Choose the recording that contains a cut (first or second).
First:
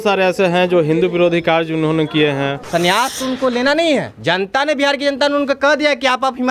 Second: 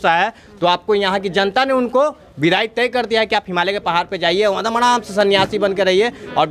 first